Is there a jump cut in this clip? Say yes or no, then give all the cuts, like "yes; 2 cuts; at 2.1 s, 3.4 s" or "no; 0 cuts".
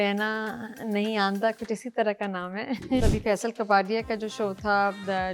yes; 1 cut; at 3.1 s